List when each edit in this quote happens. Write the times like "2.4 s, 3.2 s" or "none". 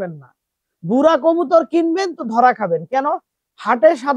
none